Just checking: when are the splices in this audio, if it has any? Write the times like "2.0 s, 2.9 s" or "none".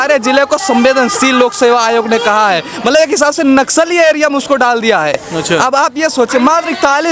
none